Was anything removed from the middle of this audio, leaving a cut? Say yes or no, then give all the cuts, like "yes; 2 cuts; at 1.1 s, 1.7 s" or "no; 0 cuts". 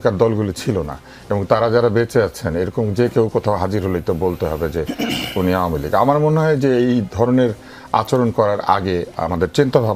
no; 0 cuts